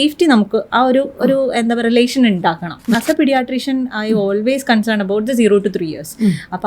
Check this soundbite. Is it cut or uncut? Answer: cut